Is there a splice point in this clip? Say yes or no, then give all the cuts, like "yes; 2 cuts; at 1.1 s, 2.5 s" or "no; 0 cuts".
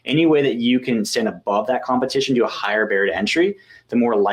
no; 0 cuts